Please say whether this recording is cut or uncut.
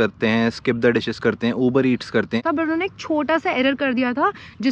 cut